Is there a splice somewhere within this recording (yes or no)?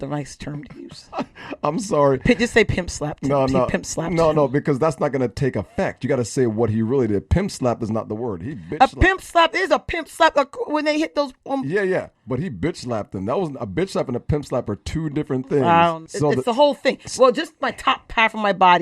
yes